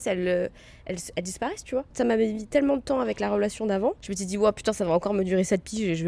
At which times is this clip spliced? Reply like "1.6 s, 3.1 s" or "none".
1.9 s, 4.1 s

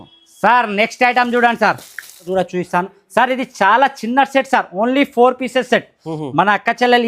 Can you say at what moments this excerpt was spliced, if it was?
2.3 s

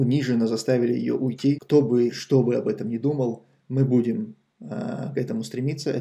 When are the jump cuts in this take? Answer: 1.6 s

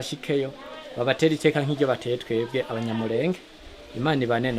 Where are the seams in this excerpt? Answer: none

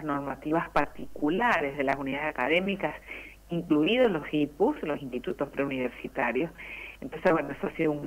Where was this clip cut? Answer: none

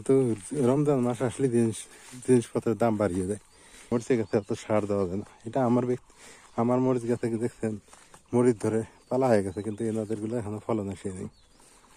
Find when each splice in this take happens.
3.8 s

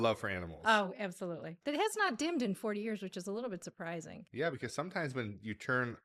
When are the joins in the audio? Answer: 1.5 s, 4.2 s

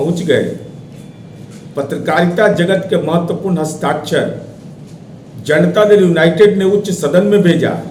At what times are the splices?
none

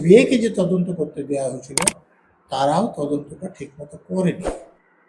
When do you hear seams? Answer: none

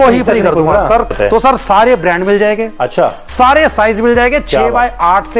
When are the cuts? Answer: 1.1 s

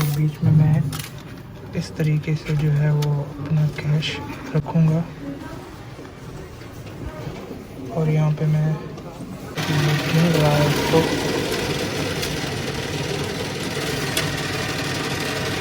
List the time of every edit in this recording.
none

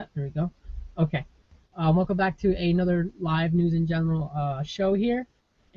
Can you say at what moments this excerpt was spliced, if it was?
none

